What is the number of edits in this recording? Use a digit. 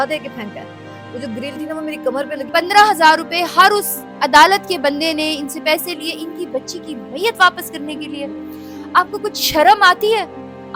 1